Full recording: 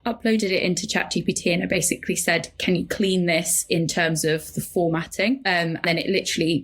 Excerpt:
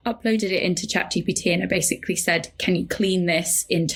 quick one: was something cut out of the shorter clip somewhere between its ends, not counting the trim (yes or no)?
no